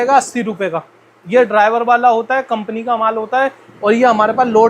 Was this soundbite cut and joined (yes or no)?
no